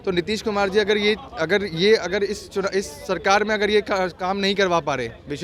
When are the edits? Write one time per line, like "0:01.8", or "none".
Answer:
none

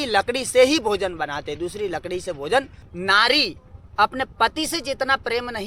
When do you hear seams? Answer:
0:02.8

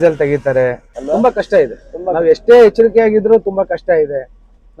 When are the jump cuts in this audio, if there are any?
none

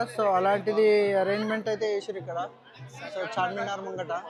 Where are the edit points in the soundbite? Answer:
none

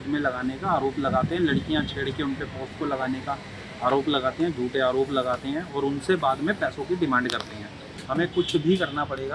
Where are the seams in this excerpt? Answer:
0:07.9

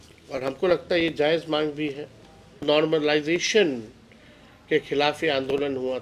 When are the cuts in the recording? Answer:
0:02.6

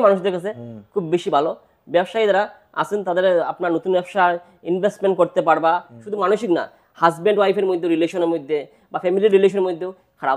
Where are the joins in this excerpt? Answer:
0:06.1

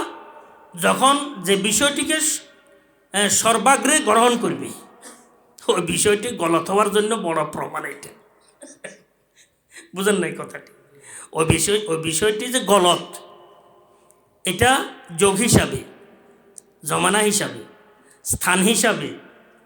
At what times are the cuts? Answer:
none

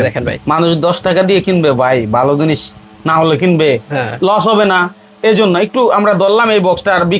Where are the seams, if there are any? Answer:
none

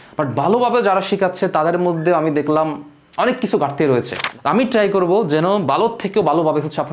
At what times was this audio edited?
0:04.2

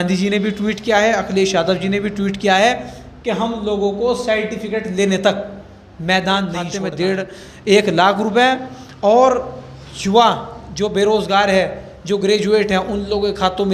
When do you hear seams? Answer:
0:06.8

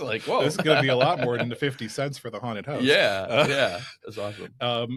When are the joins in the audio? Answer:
none

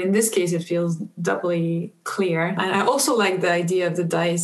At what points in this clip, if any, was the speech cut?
0:02.6

